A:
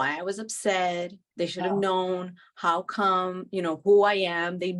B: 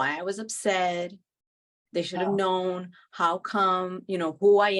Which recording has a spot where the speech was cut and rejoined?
A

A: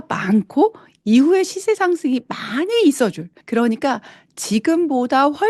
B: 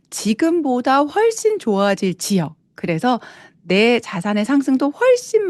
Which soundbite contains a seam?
A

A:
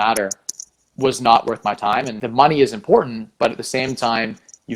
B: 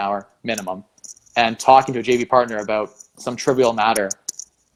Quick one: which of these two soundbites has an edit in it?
A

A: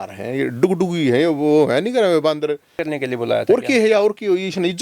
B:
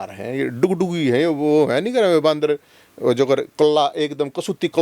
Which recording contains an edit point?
A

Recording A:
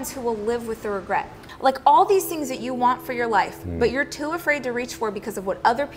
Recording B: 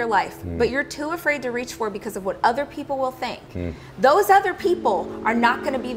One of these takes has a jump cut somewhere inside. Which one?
A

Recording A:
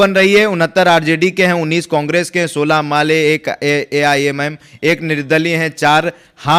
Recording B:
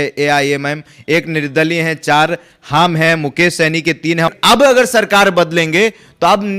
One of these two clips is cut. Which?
B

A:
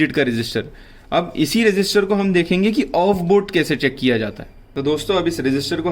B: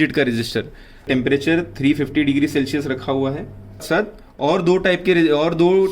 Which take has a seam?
B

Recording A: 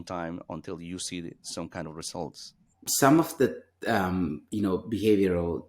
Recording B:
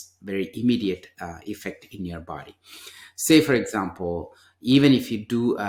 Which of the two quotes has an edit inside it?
A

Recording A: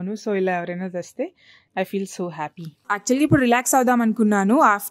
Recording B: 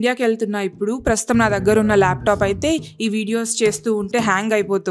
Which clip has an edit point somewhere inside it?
A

